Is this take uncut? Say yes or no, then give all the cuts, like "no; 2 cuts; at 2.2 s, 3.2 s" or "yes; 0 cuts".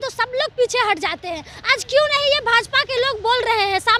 yes; 0 cuts